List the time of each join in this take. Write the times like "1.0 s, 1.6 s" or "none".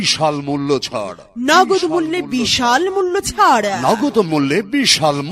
1.0 s